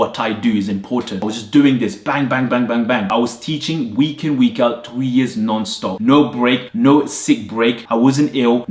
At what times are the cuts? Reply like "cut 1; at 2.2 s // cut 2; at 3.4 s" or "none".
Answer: cut 1; at 1.2 s // cut 2; at 3.1 s